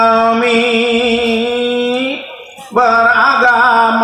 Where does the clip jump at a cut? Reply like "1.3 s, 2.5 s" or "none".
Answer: none

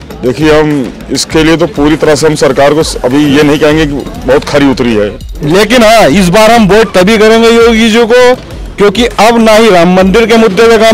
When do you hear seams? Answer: 5.2 s

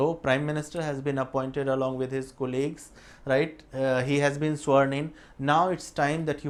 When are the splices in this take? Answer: none

